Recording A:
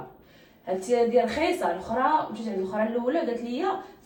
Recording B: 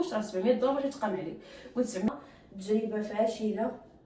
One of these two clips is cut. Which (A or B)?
B